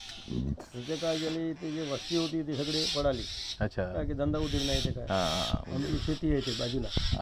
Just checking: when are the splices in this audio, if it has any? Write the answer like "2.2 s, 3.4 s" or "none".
none